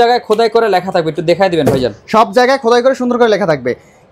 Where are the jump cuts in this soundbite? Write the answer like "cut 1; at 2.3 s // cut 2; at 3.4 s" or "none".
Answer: none

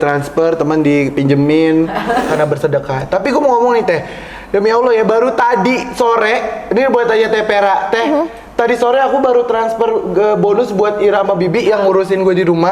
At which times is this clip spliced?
cut 1; at 2.3 s

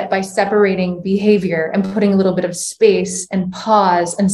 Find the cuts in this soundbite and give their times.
none

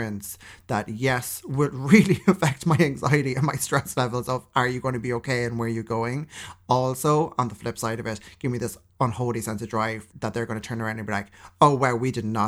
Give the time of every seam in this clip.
cut 1; at 10.1 s

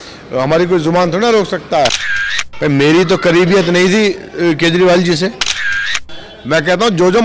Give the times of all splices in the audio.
cut 1; at 2.3 s // cut 2; at 5.8 s

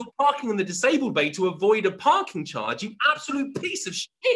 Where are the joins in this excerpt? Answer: none

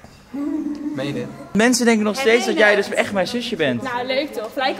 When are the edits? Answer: cut 1; at 1.5 s

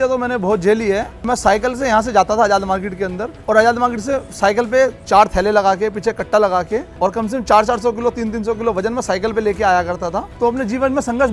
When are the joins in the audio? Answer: cut 1; at 1.2 s // cut 2; at 3.3 s // cut 3; at 5.0 s // cut 4; at 6.9 s // cut 5; at 10.3 s

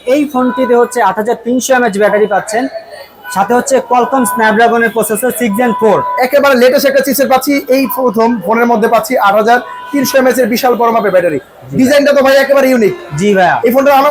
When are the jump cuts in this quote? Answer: none

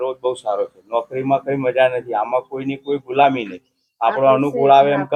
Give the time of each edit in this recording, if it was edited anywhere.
none

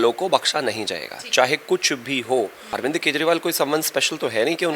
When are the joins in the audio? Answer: cut 1; at 2.7 s

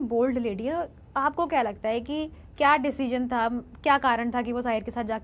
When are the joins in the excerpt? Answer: none

